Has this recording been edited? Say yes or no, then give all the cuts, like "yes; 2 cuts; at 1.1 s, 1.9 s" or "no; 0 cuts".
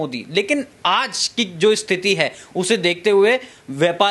no; 0 cuts